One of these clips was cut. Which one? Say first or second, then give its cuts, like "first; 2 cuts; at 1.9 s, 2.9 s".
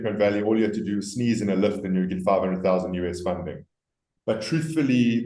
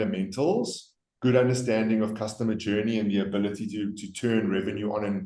first; 1 cut; at 4.1 s